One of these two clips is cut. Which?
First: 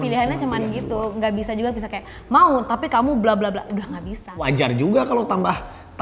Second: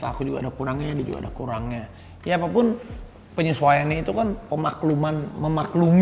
first; 1 cut; at 4.4 s

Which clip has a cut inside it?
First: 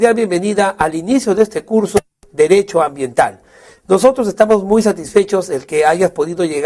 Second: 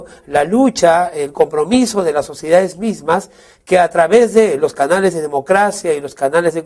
second; 1 cut; at 3.9 s

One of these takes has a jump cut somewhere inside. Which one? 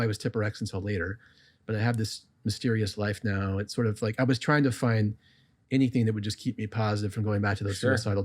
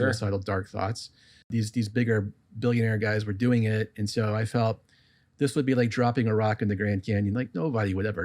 second; 1 cut; at 1.5 s

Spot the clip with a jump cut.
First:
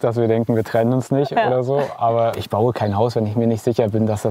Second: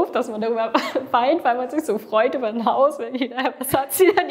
first; 1 cut; at 2.4 s

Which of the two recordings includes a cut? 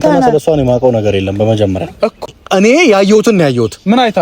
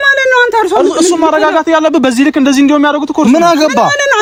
first; 1 cut; at 2.3 s

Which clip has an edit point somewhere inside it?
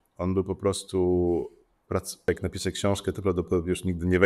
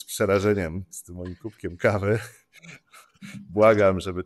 first; 1 cut; at 2.3 s

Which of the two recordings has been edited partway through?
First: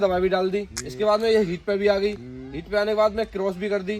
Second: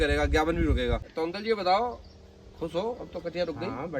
second; 1 cut; at 1.1 s

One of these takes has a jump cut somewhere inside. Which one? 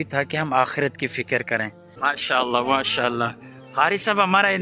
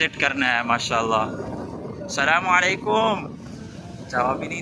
first; 1 cut; at 1.8 s

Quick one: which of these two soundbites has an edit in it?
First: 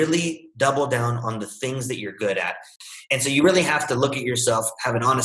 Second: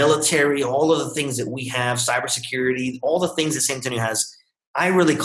first; 1 cut; at 2.7 s

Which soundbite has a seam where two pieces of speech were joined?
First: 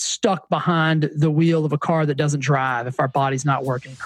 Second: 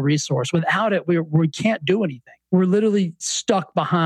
second; 1 cut; at 2.4 s

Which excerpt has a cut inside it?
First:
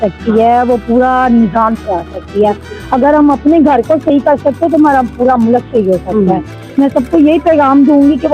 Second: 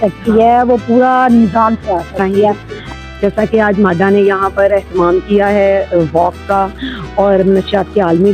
second; 1 cut; at 2.7 s

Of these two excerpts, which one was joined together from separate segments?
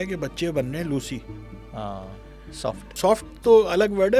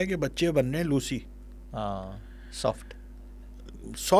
first; 1 cut; at 2.9 s

